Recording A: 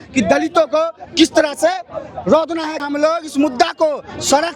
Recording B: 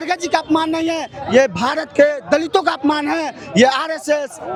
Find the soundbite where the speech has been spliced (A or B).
A